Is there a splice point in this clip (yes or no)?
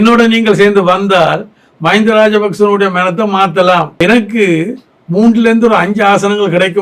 yes